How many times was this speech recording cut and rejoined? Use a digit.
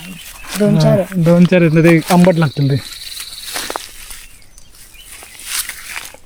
0